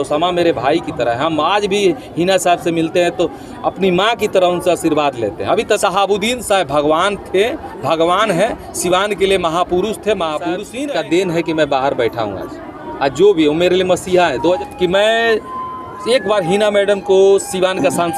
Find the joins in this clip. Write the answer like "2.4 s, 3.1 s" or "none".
5.8 s, 10.7 s, 14.6 s